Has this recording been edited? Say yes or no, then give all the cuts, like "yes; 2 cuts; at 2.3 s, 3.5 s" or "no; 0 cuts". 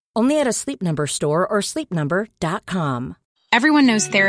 yes; 1 cut; at 3.2 s